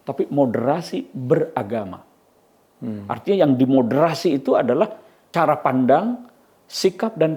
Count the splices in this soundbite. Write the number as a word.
one